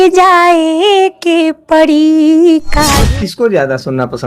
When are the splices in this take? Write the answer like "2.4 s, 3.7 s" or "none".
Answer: 3.0 s